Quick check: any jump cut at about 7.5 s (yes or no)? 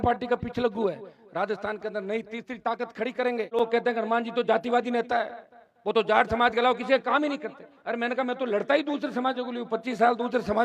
no